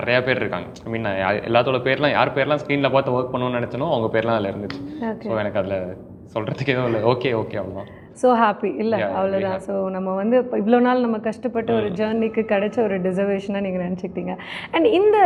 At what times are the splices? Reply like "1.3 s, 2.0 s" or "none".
none